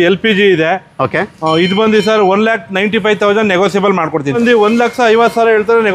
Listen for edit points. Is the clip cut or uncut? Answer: cut